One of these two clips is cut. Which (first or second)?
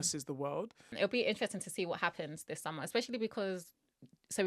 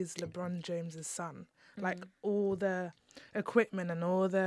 first